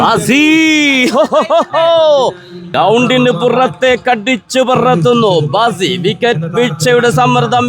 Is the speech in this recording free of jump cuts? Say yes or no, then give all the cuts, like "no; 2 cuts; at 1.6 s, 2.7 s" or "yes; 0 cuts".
no; 1 cut; at 2.7 s